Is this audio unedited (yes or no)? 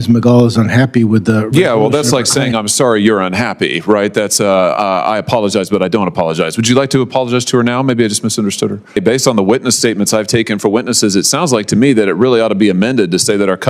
no